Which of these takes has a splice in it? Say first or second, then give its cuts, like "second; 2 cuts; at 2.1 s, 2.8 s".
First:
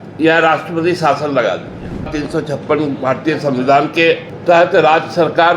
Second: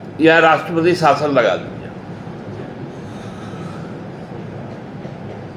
first; 2 cuts; at 2.1 s, 4.3 s